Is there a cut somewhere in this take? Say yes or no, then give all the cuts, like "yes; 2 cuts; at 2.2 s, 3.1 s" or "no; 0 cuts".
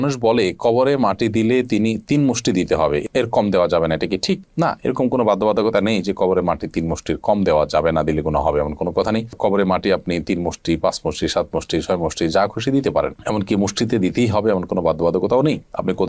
no; 0 cuts